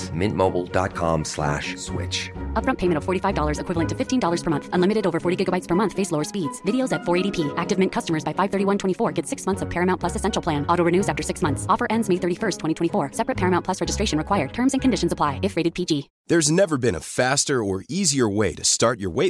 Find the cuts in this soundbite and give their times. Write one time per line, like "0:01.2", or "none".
0:16.1